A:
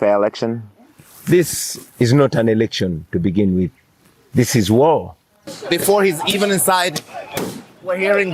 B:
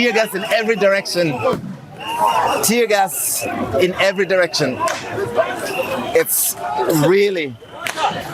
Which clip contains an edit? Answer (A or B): A